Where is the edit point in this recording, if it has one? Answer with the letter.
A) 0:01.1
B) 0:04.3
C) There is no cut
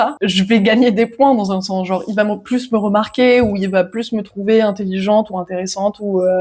C